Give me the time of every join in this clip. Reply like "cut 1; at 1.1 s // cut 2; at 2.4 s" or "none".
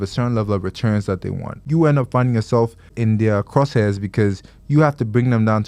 cut 1; at 1.6 s // cut 2; at 2.9 s